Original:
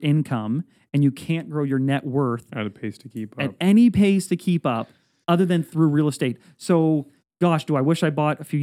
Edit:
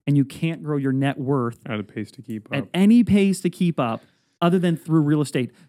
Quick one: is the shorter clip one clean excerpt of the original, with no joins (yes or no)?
yes